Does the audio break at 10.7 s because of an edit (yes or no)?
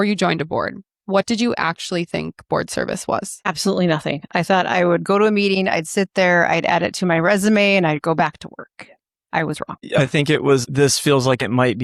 yes